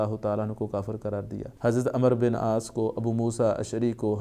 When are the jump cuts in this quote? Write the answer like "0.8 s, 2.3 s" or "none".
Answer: 1.4 s